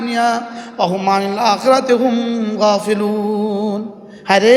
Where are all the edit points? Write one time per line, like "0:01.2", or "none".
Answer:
none